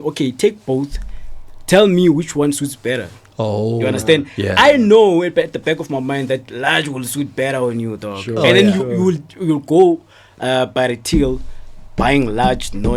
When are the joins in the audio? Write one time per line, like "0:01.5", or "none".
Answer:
none